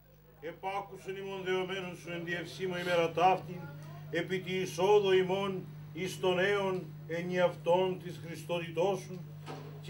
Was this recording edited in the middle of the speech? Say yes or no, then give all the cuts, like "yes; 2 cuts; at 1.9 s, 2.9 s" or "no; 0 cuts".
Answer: no; 0 cuts